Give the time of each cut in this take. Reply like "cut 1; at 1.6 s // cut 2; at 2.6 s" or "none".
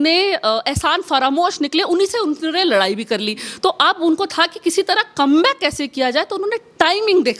none